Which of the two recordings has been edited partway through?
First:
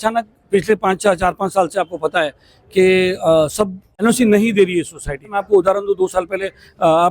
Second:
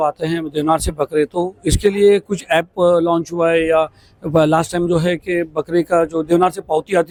first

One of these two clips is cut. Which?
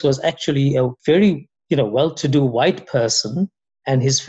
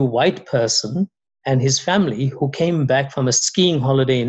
first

